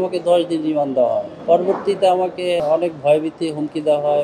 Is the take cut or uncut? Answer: cut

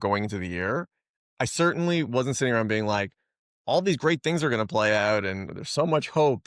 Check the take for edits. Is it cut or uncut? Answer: uncut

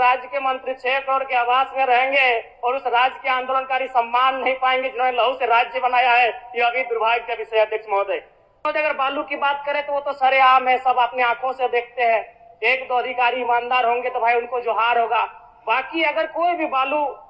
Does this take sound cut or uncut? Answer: cut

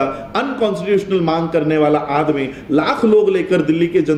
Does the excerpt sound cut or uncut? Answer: uncut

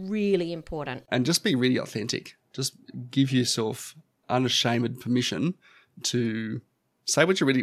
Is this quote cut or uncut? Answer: cut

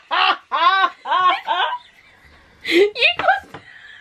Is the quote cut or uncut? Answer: uncut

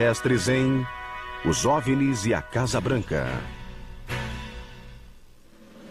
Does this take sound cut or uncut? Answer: cut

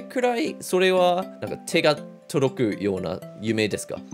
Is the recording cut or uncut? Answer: uncut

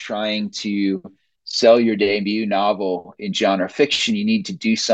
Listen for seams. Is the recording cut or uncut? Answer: uncut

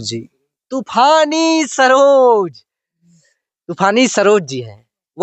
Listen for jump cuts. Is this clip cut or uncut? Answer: uncut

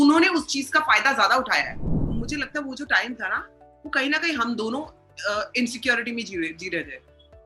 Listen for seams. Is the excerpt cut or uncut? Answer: cut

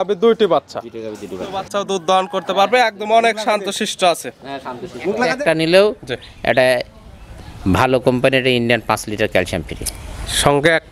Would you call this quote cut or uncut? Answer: cut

